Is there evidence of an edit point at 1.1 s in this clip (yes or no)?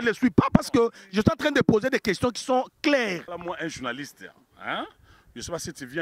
no